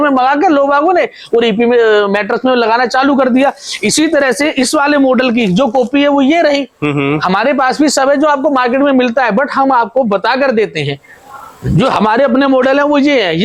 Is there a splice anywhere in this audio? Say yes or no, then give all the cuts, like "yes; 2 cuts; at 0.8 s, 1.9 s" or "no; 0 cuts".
no; 0 cuts